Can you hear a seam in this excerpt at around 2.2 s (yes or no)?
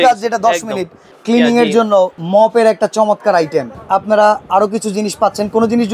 yes